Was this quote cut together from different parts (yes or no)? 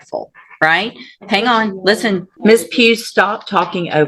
yes